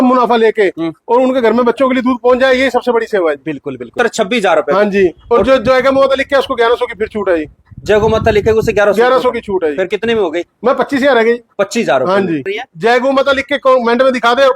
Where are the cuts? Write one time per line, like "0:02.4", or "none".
0:03.9
0:12.6